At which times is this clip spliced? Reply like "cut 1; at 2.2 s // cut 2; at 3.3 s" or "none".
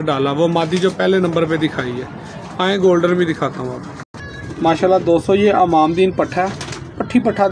none